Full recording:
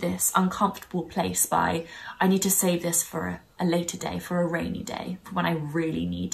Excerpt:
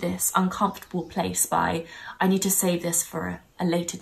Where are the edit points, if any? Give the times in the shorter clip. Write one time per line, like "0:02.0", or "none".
none